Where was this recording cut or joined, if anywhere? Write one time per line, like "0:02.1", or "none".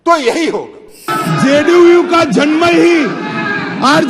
0:01.1